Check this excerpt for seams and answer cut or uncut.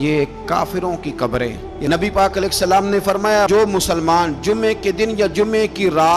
cut